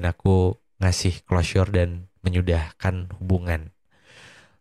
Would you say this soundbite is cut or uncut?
uncut